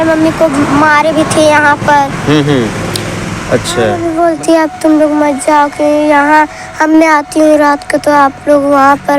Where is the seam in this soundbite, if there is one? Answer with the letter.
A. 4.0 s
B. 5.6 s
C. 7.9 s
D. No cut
A